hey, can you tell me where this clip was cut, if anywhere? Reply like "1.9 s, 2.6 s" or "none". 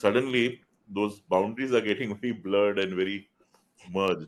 none